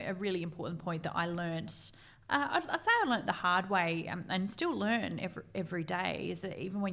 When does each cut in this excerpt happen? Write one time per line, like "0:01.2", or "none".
none